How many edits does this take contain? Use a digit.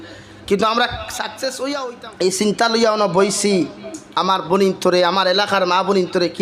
1